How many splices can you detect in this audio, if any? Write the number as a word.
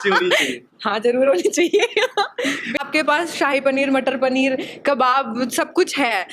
one